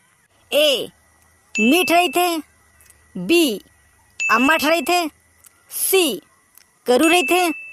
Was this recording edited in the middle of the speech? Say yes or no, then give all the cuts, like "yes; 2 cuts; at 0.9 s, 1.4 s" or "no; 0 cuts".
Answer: no; 0 cuts